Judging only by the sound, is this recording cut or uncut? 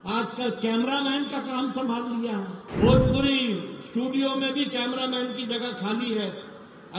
cut